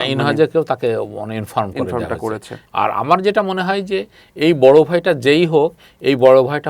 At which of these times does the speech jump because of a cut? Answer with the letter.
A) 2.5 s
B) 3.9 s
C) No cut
A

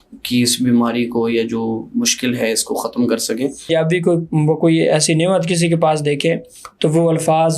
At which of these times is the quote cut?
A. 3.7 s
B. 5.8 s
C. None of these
A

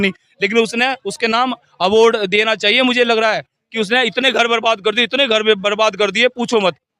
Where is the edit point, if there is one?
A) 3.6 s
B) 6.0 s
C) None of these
C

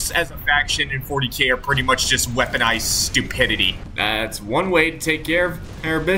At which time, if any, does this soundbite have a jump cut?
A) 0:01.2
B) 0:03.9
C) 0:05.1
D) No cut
B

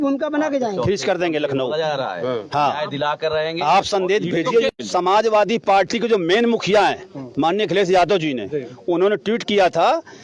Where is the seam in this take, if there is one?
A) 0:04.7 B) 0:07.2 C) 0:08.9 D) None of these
A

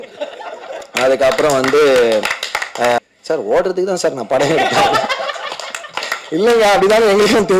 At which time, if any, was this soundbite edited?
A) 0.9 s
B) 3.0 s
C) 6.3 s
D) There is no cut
B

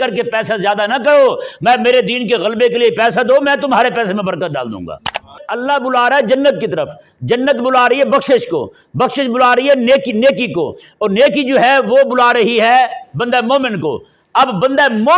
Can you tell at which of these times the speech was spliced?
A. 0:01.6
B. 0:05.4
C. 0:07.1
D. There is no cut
B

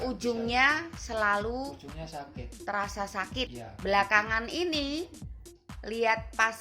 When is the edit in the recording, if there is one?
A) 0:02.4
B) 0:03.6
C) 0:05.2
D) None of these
B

